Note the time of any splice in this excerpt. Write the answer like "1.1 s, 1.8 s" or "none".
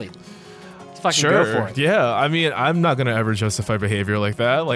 none